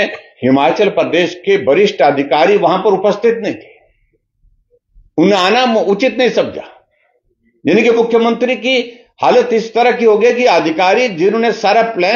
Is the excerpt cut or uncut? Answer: uncut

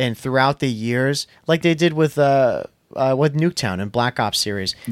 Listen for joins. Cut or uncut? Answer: uncut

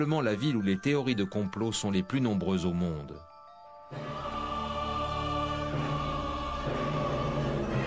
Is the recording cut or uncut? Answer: uncut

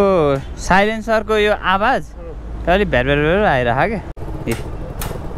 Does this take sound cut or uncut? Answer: cut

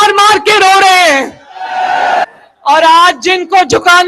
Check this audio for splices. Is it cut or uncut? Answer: cut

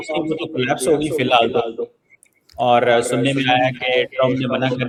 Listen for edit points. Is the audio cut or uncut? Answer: uncut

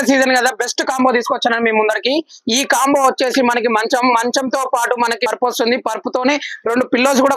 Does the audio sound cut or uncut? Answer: uncut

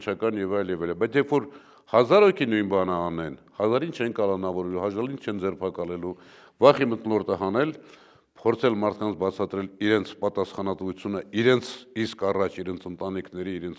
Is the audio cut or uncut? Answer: uncut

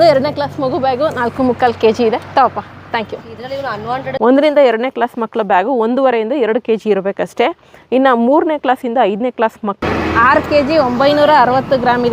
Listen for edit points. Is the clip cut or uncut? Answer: cut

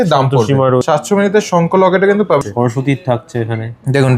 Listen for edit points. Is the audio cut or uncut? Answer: cut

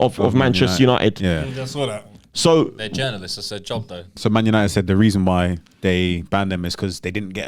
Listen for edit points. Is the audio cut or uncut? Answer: cut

